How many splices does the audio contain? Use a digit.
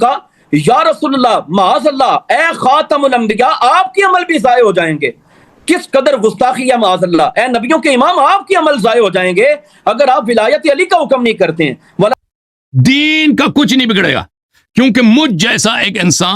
1